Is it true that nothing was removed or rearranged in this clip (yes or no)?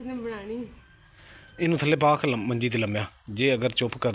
yes